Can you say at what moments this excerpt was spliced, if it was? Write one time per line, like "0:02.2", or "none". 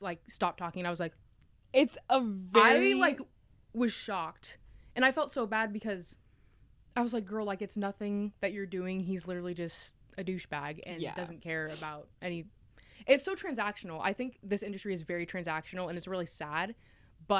none